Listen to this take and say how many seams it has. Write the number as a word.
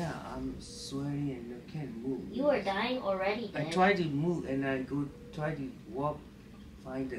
zero